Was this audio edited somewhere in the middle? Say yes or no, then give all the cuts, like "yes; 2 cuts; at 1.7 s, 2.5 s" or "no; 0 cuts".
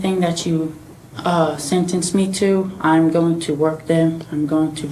no; 0 cuts